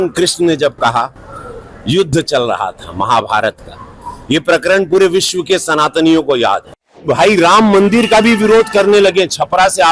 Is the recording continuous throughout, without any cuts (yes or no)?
no